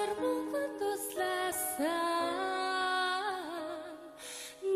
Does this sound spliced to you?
no; 0 cuts

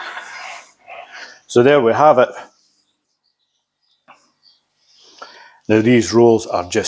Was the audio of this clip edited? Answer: yes; 1 cut; at 3.1 s

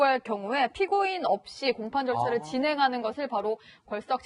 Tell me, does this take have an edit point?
no; 0 cuts

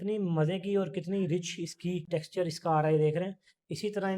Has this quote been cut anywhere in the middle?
yes; 1 cut; at 2.0 s

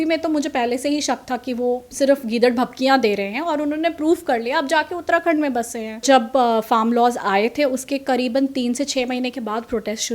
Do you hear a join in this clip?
yes; 2 cuts; at 1.9 s, 6.0 s

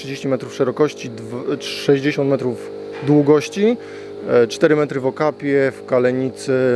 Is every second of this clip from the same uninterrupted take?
yes; 0 cuts

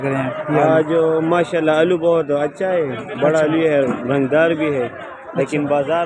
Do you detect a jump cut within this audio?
no; 0 cuts

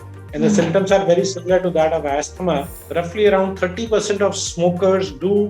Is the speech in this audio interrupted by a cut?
yes; 1 cut; at 2.4 s

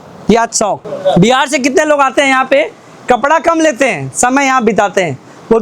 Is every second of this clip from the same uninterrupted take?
no; 1 cut; at 0.9 s

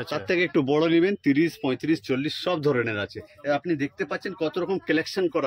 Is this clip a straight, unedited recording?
yes; 0 cuts

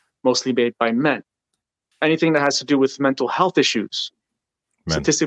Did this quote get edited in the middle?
yes; 1 cut; at 1.9 s

